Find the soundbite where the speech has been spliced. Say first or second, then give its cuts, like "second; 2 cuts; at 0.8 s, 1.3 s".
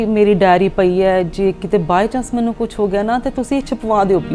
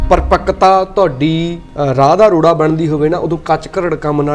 second; 1 cut; at 1.6 s